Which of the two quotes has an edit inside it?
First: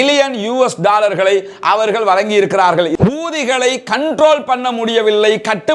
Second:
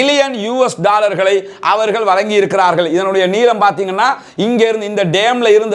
first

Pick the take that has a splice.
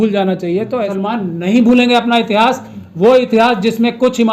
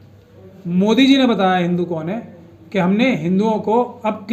first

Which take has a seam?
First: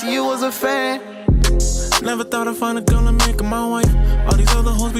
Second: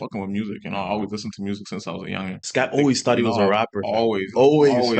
second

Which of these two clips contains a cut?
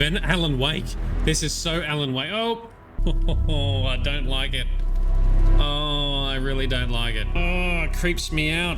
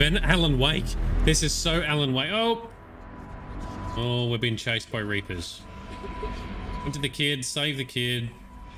first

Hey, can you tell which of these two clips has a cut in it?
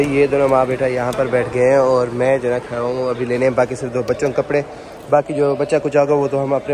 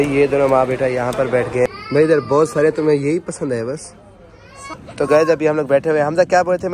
second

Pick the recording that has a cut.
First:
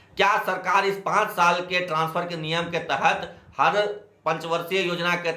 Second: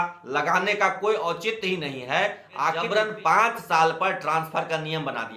second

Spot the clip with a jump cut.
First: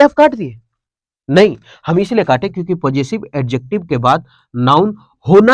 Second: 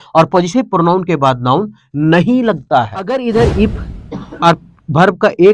second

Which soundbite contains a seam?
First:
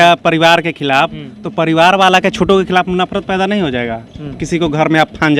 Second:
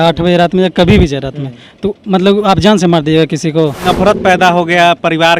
second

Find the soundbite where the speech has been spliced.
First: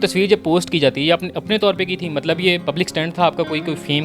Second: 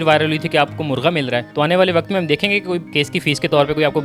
first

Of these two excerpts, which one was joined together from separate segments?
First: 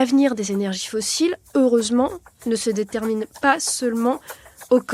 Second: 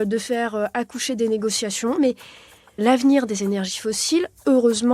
second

